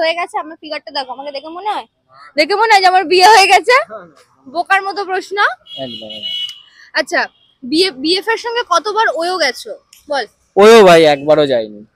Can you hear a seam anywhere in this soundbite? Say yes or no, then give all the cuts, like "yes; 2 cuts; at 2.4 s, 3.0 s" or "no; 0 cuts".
no; 0 cuts